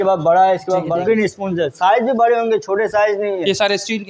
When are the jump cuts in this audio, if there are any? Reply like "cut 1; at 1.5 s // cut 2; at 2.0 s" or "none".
cut 1; at 0.9 s